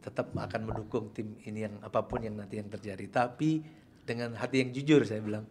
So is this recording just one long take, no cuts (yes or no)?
yes